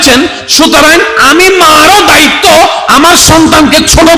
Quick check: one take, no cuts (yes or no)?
yes